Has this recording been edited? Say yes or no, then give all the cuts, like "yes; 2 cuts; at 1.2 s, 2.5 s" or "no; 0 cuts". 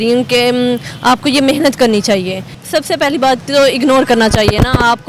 yes; 1 cut; at 2.6 s